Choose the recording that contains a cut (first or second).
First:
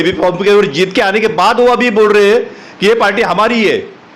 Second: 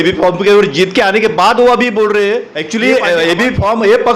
second